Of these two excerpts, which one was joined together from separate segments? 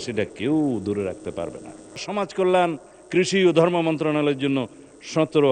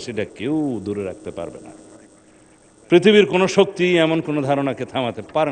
first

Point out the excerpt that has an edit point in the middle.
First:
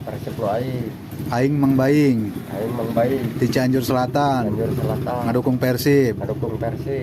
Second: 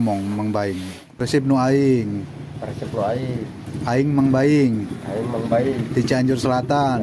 second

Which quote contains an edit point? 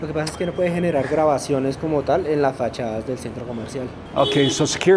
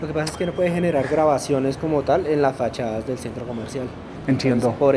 first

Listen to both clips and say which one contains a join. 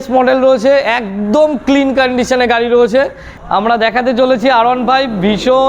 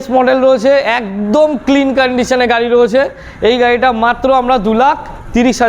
first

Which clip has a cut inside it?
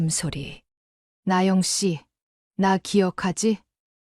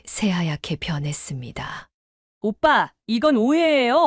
first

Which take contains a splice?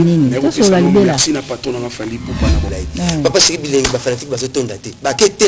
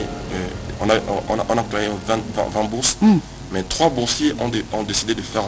first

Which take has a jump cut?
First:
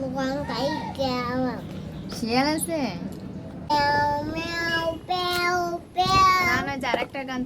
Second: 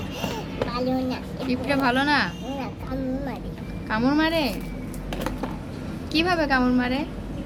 first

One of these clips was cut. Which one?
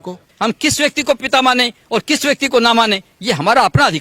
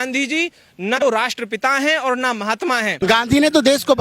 second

